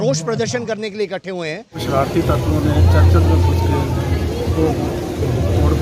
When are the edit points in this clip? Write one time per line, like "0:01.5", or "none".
0:01.8